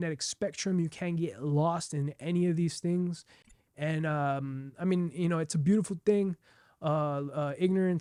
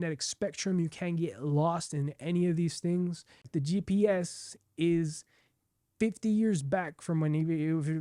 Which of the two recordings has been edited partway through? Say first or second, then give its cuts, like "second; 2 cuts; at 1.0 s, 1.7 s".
second; 1 cut; at 3.5 s